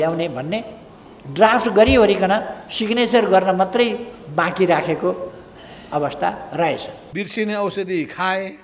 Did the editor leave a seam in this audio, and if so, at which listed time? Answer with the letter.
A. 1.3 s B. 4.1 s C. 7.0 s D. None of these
C